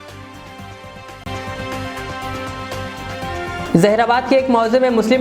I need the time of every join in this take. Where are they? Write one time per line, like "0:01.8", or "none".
0:01.2
0:03.5